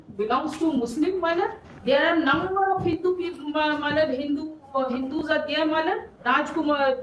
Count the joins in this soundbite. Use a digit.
2